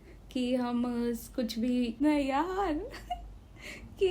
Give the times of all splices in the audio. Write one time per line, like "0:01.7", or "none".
0:02.0